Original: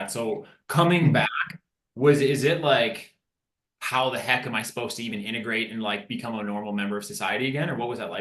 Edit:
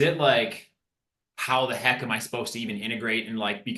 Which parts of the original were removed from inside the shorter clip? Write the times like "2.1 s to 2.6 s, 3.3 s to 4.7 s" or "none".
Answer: none

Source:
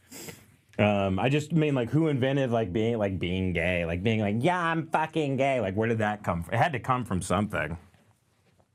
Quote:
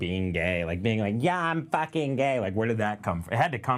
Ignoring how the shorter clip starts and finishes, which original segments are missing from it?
none

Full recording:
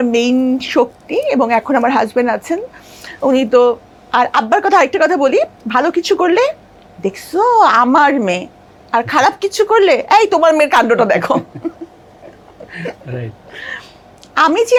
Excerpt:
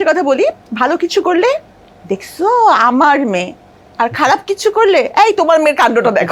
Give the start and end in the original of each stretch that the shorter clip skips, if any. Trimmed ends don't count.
none

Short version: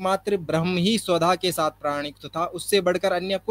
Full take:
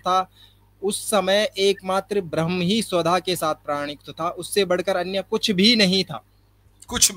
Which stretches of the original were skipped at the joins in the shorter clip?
none

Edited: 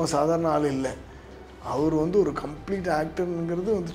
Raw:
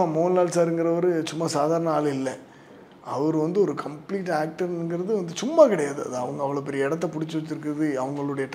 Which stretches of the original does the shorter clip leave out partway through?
none

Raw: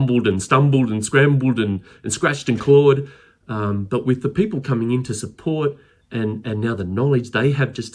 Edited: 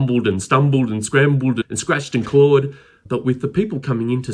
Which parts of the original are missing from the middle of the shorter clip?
1.6 s to 2.0 s, 3.4 s to 3.8 s

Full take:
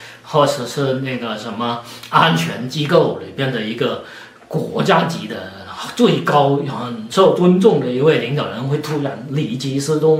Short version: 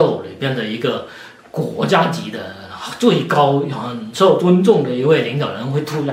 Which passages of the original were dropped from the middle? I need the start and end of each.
none

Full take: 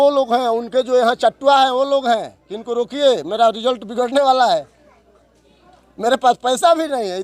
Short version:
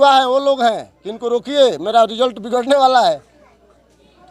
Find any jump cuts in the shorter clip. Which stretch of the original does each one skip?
none

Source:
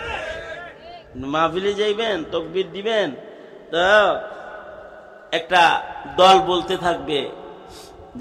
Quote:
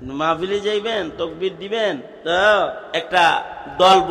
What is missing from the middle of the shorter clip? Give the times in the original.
3.2 s to 3.6 s, 4.3 s to 5.2 s

